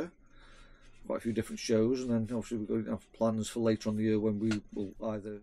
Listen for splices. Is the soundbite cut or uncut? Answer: uncut